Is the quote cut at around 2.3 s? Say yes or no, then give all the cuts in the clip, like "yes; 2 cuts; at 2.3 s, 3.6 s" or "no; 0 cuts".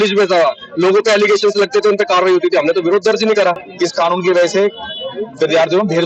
no; 1 cut; at 3.7 s